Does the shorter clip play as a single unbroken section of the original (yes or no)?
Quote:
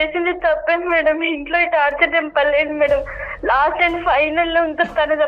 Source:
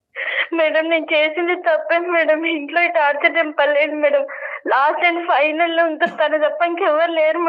yes